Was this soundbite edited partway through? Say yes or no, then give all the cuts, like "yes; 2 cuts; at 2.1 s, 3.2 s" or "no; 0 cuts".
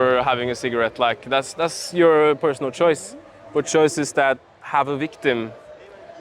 no; 0 cuts